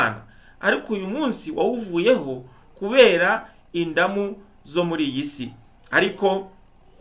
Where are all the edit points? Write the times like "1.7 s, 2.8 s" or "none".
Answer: none